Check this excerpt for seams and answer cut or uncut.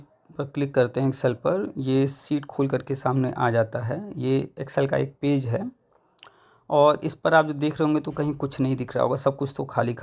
uncut